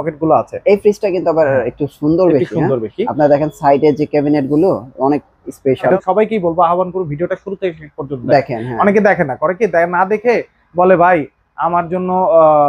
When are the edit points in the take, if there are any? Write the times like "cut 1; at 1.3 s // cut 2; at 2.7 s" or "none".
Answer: cut 1; at 5.9 s